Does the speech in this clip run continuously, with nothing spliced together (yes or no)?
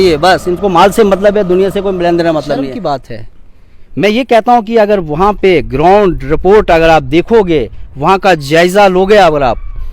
no